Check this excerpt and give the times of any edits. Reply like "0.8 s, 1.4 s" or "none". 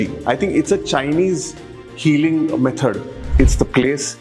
3.2 s

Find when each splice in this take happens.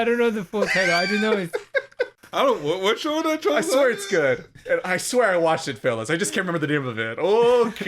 2.2 s

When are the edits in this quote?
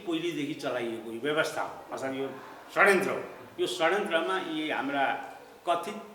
none

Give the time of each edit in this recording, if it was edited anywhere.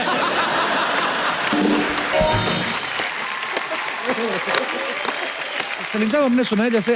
5.9 s

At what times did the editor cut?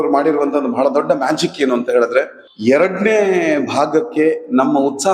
none

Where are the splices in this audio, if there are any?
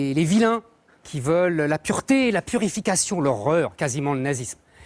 none

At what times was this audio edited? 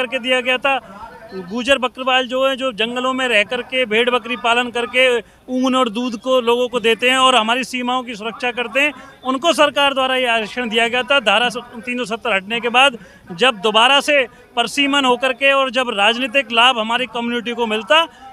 none

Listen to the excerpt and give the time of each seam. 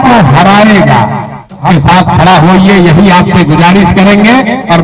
1.6 s

